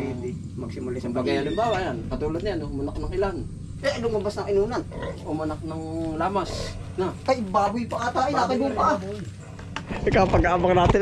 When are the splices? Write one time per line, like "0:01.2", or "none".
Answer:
0:09.9